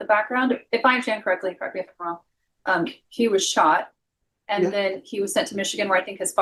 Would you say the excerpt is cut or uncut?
uncut